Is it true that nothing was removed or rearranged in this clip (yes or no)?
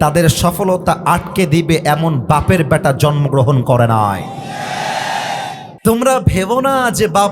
no